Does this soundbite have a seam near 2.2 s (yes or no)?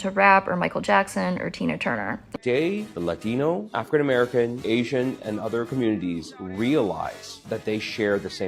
yes